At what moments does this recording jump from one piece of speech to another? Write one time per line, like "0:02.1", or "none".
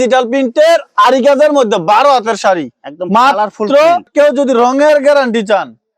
0:04.1